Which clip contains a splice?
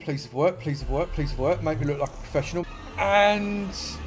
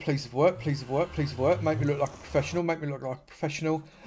first; 1 cut; at 2.6 s

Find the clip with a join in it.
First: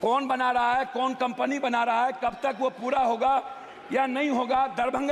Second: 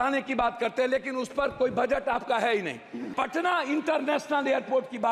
second; 1 cut; at 3.0 s

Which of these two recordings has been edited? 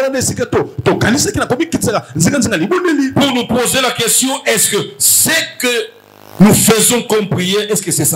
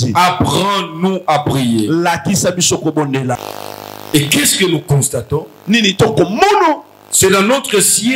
second; 1 cut; at 3.4 s

